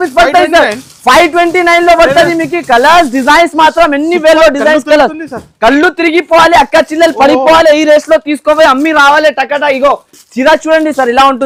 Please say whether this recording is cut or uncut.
uncut